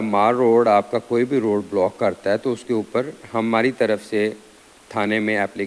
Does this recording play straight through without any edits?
yes; 0 cuts

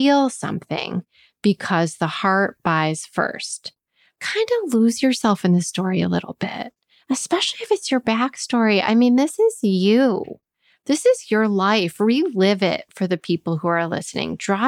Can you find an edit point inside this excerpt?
yes; 1 cut; at 4.2 s

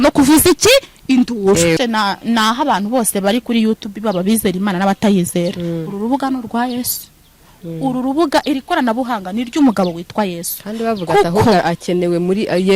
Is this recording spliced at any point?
yes; 1 cut; at 1.8 s

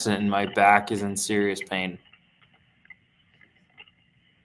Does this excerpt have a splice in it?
no; 0 cuts

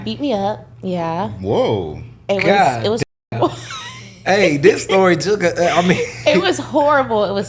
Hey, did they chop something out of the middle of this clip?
no; 0 cuts

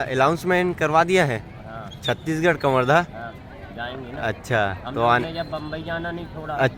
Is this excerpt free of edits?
yes; 0 cuts

